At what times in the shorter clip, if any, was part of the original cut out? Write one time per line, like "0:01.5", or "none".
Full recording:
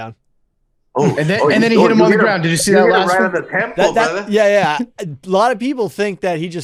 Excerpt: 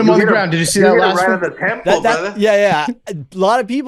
none